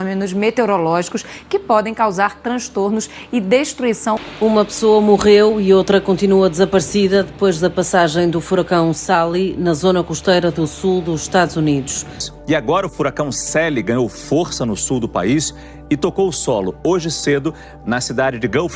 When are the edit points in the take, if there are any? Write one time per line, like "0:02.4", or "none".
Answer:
0:04.2
0:12.3